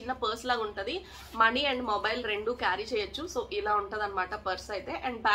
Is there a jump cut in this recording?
no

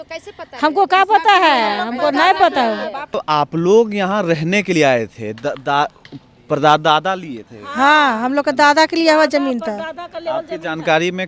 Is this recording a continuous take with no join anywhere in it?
yes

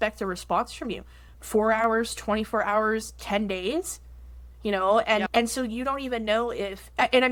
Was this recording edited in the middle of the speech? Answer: no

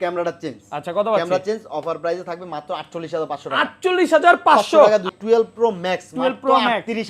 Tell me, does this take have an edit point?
yes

